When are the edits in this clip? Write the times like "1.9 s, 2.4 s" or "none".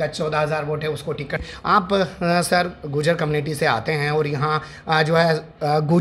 1.4 s